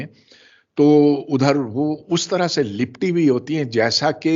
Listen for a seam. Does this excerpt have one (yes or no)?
no